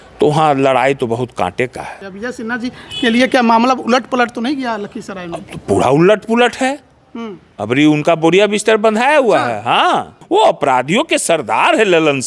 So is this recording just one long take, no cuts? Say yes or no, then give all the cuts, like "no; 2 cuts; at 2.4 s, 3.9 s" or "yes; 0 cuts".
no; 2 cuts; at 2.0 s, 10.2 s